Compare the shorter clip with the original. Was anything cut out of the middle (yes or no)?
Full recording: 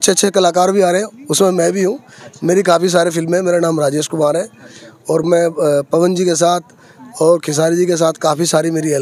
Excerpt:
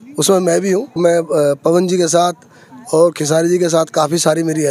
yes